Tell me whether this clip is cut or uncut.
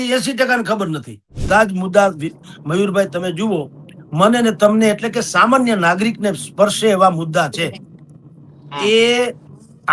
cut